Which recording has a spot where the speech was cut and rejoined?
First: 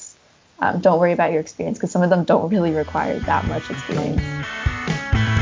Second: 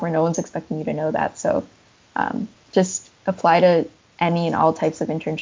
first; 1 cut; at 4.3 s

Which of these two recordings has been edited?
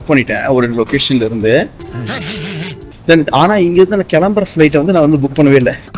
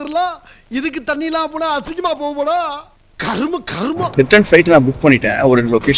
second; 1 cut; at 4.0 s

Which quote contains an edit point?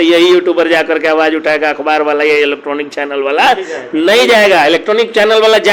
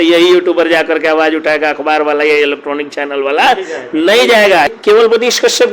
second; 1 cut; at 4.7 s

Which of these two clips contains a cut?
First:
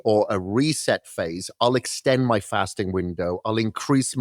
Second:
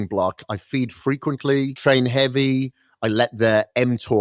second; 1 cut; at 1.8 s

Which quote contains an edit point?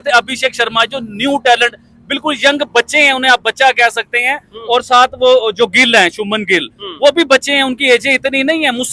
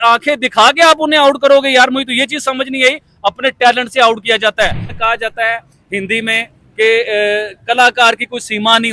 second; 1 cut; at 4.8 s

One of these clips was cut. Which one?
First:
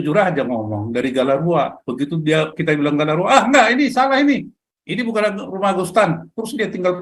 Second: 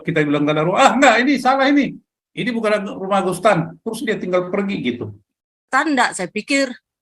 second; 1 cut; at 5.7 s

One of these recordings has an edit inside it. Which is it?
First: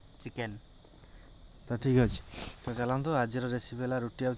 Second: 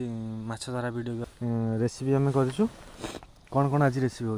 second; 1 cut; at 1.3 s

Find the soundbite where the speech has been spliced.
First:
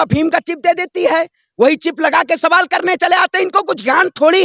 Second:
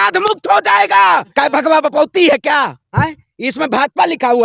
second; 1 cut; at 1.3 s

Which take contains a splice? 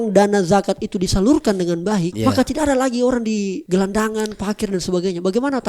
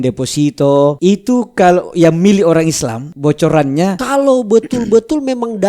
second; 2 cuts; at 1.0 s, 4.0 s

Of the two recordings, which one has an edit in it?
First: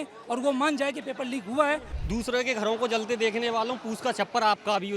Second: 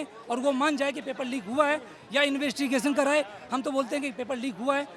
first; 1 cut; at 2.0 s

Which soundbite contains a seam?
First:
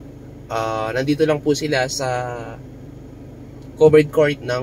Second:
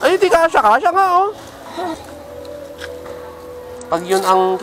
second; 1 cut; at 1.9 s

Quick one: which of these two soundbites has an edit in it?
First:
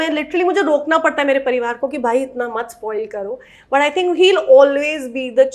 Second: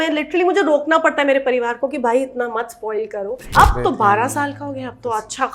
second; 1 cut; at 3.4 s

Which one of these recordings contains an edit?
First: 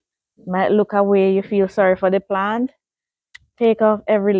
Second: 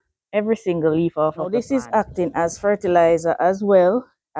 second; 1 cut; at 1.4 s

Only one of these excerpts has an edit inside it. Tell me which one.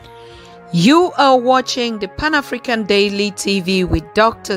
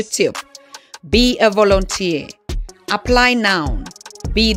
first; 1 cut; at 1.0 s

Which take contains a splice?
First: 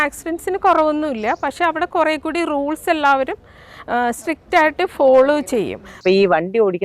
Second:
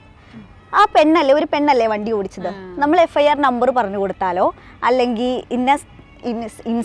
first; 1 cut; at 5.9 s

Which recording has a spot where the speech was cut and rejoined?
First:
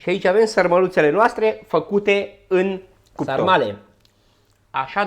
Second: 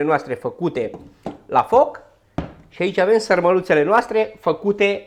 first; 1 cut; at 3.3 s

